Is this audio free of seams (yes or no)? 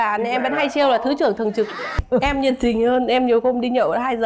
no